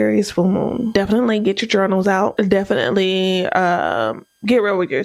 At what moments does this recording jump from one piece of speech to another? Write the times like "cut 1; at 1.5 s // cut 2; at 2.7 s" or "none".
cut 1; at 0.9 s // cut 2; at 2.3 s